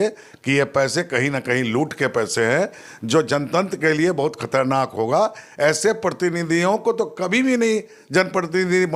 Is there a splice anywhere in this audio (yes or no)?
no